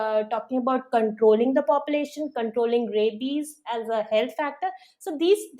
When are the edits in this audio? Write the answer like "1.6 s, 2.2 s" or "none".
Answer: none